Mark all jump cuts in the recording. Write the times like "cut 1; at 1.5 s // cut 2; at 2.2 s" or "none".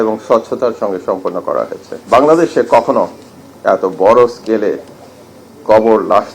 cut 1; at 1.9 s